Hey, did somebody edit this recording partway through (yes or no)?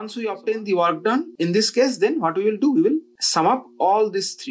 yes